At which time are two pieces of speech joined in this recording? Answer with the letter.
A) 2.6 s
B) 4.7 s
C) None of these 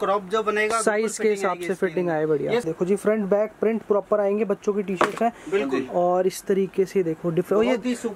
A